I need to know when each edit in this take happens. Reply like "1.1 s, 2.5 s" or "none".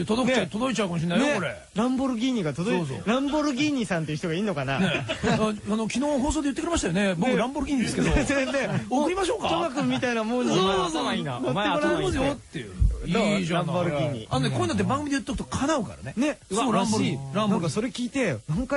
none